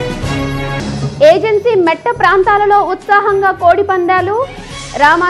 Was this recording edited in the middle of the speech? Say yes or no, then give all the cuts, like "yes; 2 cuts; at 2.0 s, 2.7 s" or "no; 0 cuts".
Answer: yes; 1 cut; at 1.0 s